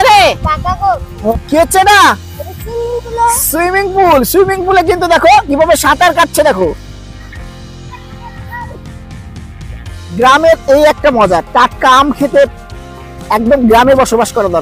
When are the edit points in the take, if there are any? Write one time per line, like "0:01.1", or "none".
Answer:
0:01.3
0:10.2